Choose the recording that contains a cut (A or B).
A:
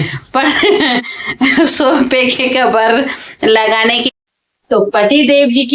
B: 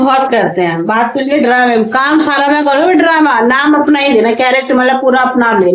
A